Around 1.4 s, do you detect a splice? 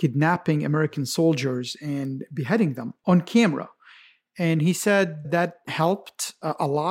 no; 1 cut; at 2.9 s

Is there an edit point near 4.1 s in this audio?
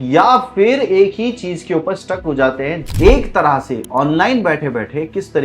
no; 1 cut; at 2.8 s

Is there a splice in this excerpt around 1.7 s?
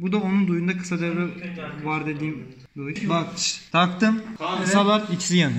no; 1 cut; at 3.3 s

